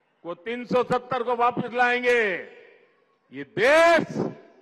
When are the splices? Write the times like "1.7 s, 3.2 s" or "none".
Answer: none